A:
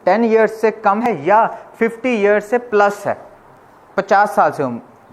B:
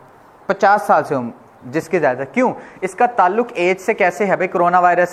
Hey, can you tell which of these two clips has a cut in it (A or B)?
A